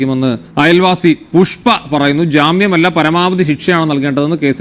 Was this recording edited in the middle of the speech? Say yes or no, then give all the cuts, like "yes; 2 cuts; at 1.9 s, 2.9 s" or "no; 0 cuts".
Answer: no; 0 cuts